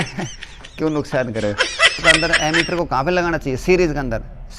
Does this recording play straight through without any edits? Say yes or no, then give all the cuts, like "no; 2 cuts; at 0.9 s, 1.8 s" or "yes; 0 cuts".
no; 1 cut; at 2.0 s